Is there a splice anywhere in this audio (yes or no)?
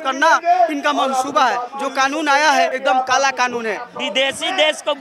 yes